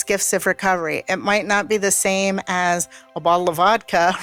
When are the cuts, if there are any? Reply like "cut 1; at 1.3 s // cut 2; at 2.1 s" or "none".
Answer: none